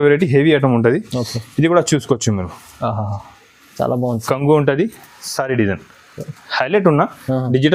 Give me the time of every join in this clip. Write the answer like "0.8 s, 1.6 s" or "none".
none